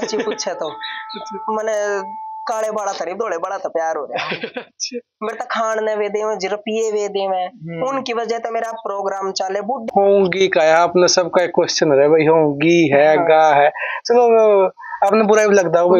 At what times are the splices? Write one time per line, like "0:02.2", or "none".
0:09.8